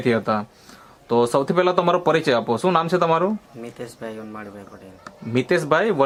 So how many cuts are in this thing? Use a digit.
0